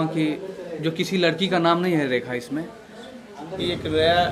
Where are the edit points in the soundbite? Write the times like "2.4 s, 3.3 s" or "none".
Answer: 3.4 s